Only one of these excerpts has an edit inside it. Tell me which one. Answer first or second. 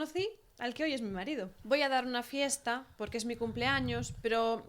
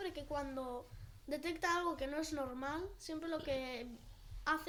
first